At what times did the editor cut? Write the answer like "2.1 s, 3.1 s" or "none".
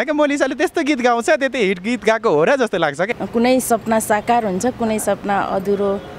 3.2 s